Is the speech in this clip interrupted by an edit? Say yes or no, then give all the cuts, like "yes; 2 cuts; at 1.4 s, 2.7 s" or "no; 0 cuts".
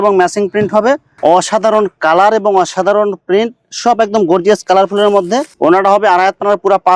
yes; 2 cuts; at 1.1 s, 5.5 s